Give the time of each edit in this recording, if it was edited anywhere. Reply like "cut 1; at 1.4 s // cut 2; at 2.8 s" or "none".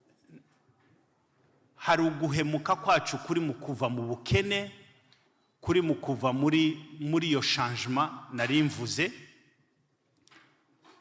none